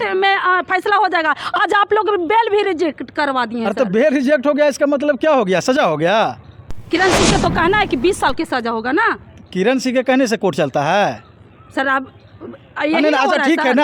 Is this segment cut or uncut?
uncut